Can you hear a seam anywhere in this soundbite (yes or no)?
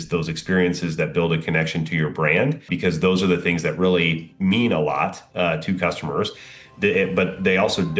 yes